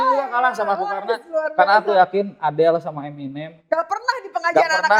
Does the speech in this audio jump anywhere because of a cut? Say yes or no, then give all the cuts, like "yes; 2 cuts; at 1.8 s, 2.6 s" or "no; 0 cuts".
no; 0 cuts